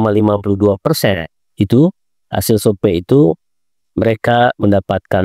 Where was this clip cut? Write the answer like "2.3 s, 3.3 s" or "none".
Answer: none